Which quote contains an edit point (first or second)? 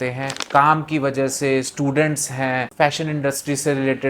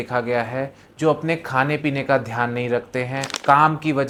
first